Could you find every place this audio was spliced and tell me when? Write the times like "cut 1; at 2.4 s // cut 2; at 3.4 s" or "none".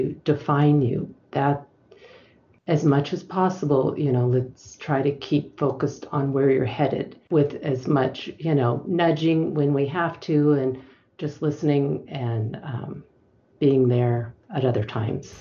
cut 1; at 7.1 s // cut 2; at 14.4 s